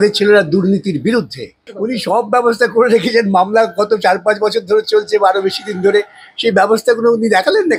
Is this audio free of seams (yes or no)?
no